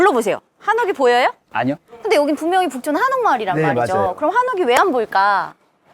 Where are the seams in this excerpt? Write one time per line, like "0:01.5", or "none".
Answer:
0:01.9